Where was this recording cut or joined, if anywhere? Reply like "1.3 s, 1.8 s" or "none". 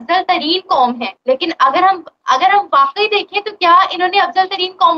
none